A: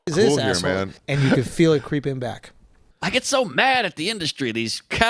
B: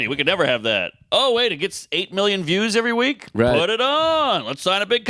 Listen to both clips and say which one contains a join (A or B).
A